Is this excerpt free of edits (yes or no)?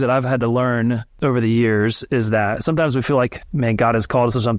no